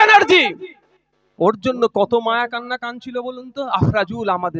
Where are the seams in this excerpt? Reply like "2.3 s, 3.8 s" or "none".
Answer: none